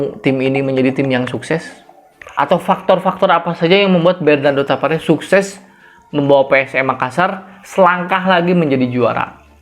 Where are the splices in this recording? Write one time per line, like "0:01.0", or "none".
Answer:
none